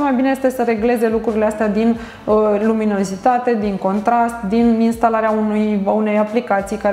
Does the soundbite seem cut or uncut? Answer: uncut